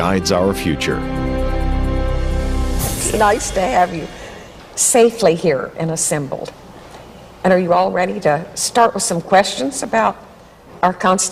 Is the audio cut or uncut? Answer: cut